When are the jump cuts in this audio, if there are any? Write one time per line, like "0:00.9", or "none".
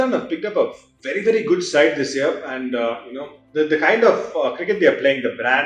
none